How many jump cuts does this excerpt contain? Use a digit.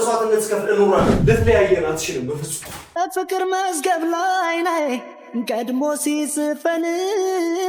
1